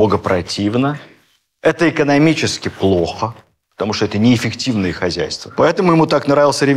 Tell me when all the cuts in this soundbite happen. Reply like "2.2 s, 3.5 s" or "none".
5.4 s